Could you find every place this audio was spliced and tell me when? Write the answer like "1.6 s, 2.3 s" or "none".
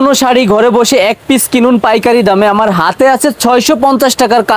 none